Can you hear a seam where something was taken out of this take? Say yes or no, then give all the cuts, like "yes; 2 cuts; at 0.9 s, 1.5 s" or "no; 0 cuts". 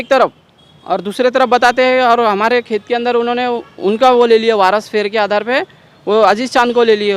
no; 0 cuts